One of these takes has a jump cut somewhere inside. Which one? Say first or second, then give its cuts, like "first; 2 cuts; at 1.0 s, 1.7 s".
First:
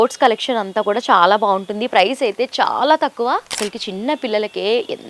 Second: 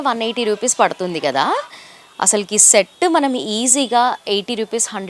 first; 1 cut; at 3.5 s